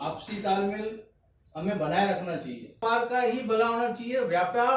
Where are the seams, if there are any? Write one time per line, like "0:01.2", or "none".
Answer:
0:02.8